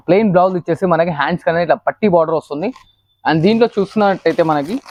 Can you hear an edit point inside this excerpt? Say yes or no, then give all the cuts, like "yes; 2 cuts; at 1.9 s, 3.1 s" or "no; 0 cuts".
no; 0 cuts